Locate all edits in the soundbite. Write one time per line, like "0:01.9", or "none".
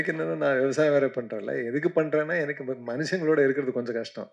none